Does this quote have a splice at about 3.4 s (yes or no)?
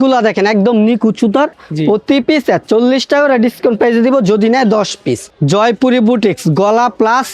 no